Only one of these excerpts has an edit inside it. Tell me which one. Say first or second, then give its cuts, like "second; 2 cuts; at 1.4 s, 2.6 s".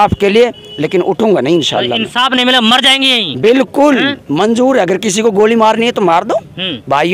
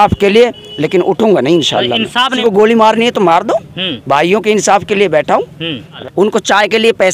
second; 2 cuts; at 2.3 s, 5.9 s